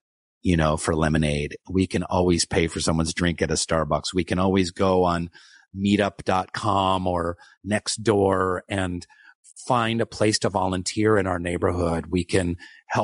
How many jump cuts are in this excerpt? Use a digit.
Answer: 0